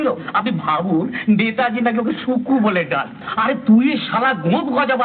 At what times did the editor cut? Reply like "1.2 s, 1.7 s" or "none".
3.2 s